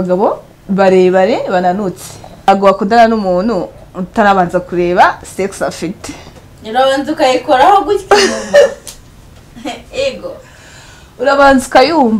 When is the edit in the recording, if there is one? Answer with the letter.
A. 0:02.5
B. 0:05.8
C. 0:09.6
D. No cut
A